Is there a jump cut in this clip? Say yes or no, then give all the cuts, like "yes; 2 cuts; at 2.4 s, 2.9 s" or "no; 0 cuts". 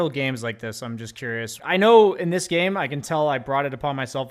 yes; 1 cut; at 1.6 s